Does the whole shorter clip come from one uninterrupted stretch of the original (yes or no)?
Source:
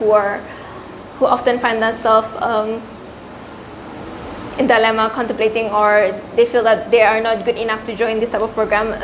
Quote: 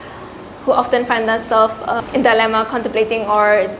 no